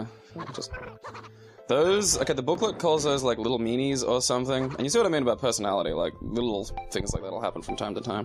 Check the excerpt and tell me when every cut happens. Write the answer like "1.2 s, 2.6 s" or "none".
3.2 s